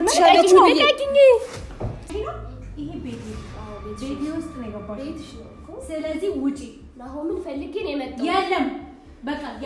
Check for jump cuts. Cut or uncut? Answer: cut